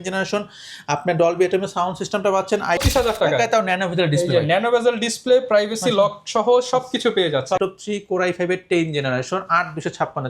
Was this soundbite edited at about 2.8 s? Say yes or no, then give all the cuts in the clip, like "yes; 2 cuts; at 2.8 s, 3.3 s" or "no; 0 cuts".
yes; 2 cuts; at 2.8 s, 7.6 s